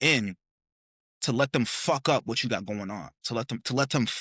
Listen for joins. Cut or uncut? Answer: uncut